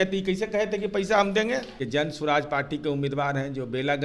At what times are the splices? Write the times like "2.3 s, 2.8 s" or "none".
1.8 s